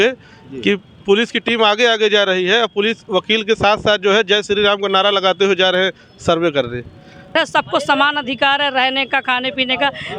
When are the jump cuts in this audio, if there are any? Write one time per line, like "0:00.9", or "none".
0:07.3